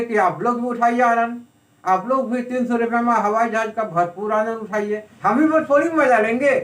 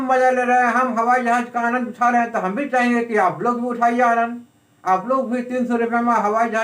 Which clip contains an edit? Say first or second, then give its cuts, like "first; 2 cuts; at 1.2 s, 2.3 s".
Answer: first; 1 cut; at 5.1 s